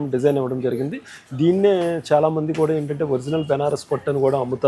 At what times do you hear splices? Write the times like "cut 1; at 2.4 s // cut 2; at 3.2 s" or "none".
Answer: none